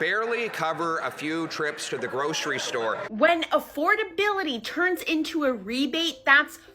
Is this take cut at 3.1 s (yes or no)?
yes